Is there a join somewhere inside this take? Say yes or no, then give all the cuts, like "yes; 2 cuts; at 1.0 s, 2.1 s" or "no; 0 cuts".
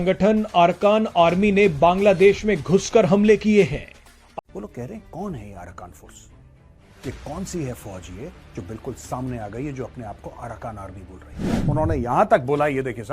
yes; 1 cut; at 4.4 s